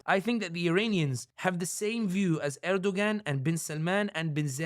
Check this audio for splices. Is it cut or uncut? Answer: cut